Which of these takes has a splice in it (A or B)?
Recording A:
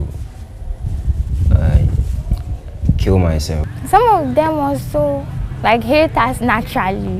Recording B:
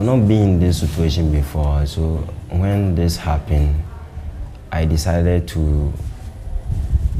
A